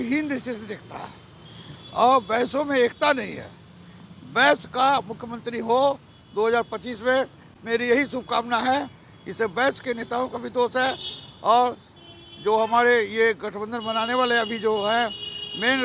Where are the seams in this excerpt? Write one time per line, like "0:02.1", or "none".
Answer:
none